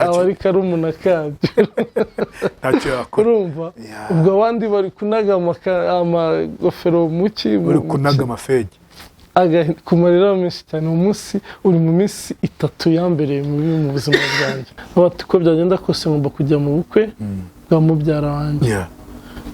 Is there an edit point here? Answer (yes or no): yes